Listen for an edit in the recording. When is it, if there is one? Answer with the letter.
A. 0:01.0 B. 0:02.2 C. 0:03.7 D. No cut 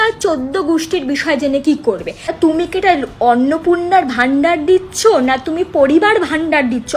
D